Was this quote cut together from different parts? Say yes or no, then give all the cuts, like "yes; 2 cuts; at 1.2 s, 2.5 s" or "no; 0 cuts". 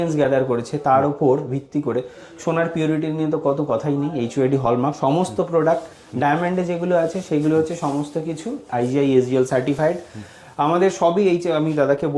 no; 0 cuts